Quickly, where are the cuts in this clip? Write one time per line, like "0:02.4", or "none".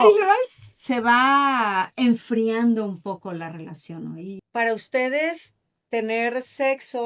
0:04.4